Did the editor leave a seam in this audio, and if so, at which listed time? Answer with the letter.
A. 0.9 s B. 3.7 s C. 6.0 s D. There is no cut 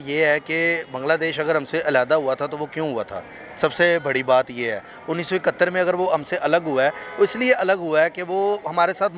D